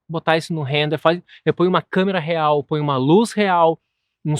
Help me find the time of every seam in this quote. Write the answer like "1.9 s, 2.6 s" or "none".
none